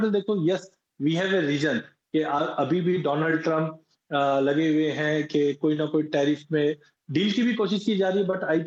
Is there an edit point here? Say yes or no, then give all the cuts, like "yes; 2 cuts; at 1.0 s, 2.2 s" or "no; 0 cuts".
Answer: no; 0 cuts